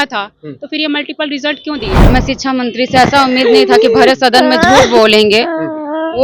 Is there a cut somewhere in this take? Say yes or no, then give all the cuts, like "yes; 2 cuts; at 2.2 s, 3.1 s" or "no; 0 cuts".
yes; 1 cut; at 2.0 s